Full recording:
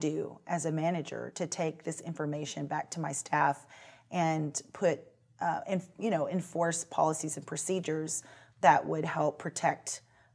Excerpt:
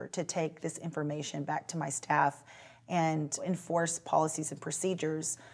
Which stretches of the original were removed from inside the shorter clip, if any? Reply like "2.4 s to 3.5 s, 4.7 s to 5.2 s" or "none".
4.7 s to 6.3 s